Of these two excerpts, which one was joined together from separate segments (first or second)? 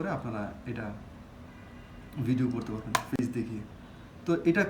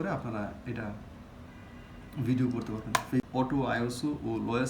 second